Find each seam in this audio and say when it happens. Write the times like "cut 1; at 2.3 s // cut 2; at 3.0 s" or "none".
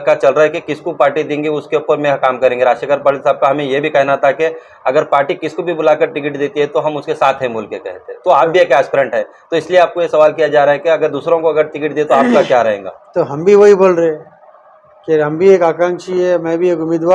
none